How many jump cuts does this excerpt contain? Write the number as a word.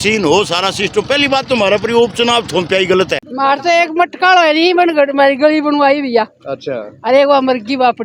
one